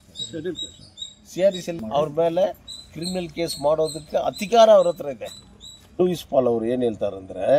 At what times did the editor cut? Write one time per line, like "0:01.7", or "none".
0:01.8
0:06.0